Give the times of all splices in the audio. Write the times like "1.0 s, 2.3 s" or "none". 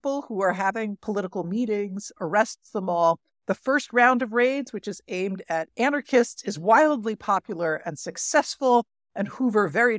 2.1 s

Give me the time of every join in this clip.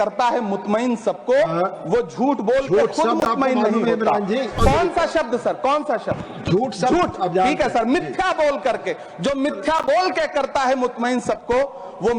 4.5 s

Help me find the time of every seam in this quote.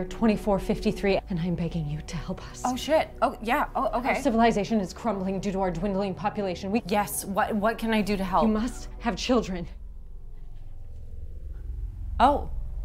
1.2 s, 6.8 s

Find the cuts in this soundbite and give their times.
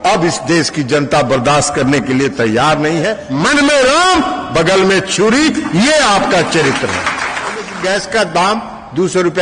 3.2 s, 7.7 s

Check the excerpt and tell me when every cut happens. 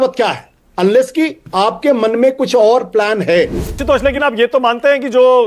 3.8 s

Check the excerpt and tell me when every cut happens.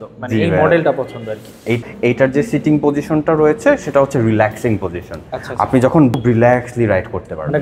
1.8 s, 6.2 s

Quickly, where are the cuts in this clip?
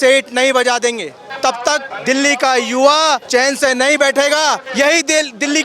1.3 s, 1.9 s, 3.2 s, 4.7 s

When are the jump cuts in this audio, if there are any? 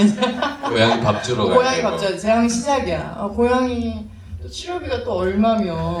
none

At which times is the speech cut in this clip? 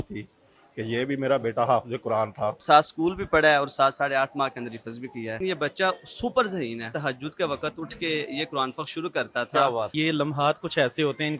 2.6 s, 5.4 s, 6.9 s, 9.9 s

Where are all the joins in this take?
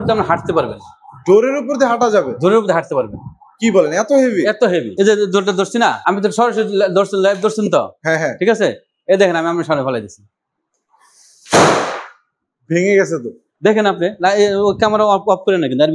4.9 s, 6.0 s

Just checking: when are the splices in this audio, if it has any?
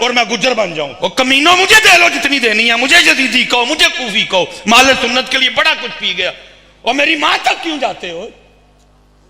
0.9 s

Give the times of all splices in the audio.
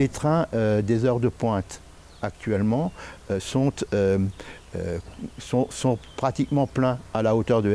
none

